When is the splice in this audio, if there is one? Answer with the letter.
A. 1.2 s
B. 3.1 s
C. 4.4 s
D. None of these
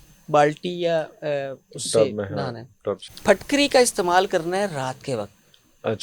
B